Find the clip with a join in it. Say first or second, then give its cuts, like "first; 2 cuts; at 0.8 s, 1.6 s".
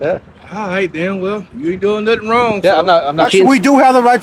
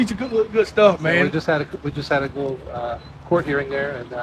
first; 1 cut; at 3.2 s